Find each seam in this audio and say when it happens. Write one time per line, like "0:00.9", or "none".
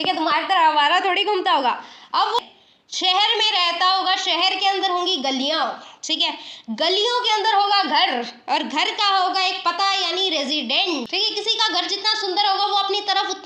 0:02.4
0:11.1